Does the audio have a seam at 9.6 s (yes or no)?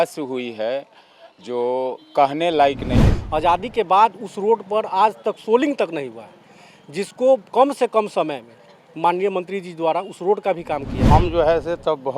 no